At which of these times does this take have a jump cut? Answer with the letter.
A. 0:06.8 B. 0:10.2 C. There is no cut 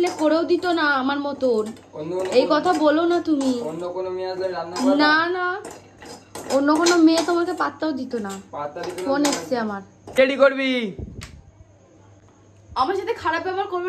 B